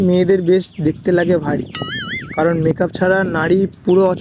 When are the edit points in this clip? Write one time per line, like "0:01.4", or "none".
none